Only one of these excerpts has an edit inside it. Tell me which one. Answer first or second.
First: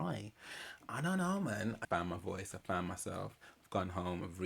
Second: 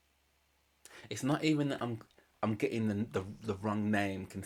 first